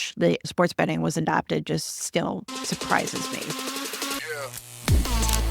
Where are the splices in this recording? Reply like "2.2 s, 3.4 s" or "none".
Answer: 3.4 s